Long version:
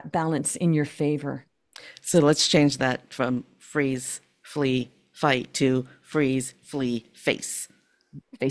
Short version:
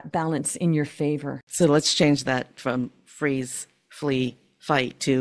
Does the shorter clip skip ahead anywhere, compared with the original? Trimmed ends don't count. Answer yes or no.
yes